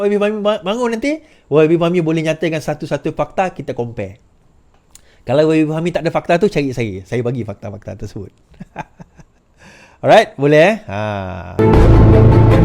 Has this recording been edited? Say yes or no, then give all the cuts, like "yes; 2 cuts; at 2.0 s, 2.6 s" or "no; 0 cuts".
yes; 1 cut; at 11.5 s